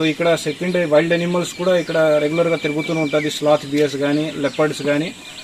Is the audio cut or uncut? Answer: uncut